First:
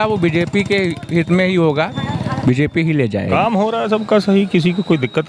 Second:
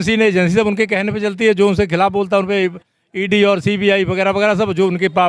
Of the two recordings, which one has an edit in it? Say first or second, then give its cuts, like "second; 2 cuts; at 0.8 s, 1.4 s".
first; 2 cuts; at 2.0 s, 3.3 s